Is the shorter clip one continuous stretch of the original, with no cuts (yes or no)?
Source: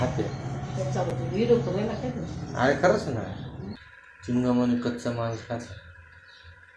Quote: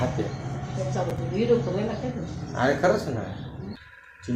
yes